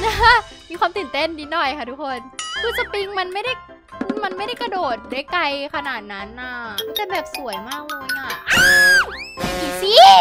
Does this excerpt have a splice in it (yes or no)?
yes